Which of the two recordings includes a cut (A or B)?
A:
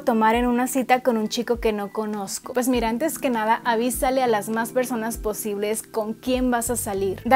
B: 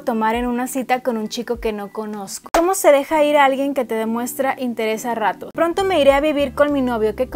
B